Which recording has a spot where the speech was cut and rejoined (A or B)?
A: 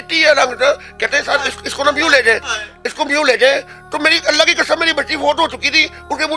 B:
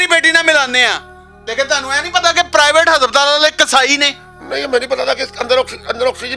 B